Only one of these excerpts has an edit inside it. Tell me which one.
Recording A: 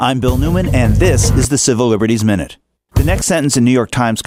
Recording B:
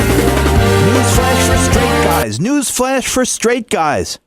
B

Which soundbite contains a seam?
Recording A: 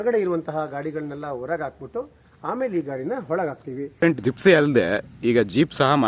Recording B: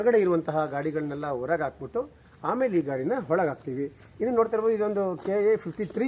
A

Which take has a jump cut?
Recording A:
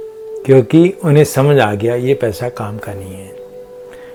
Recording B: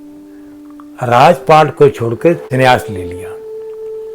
B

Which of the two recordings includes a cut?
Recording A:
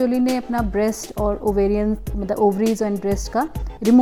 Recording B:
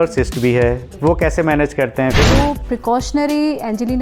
B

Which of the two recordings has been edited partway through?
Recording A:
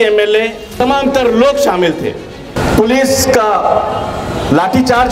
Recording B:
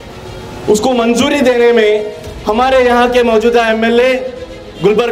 A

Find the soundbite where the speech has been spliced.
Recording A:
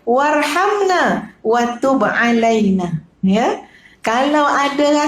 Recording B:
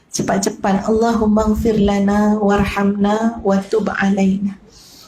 A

